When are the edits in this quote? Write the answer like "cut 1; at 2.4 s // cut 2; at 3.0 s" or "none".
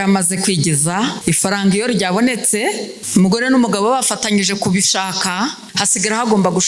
cut 1; at 1.2 s // cut 2; at 2.9 s // cut 3; at 5.7 s